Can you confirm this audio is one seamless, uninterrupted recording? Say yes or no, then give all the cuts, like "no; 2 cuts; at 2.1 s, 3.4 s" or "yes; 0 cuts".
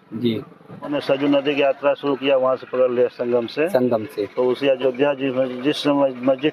no; 1 cut; at 1.0 s